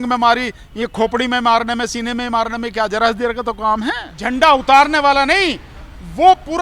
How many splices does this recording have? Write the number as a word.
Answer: one